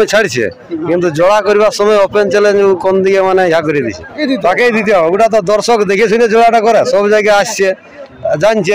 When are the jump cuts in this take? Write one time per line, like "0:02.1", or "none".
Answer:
0:04.2